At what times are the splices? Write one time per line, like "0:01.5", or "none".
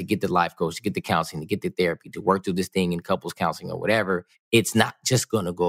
0:04.3